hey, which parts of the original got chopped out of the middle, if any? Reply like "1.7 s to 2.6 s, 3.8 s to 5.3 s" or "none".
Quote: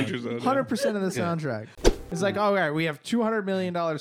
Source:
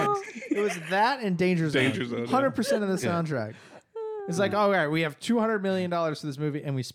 3.9 s to 4.2 s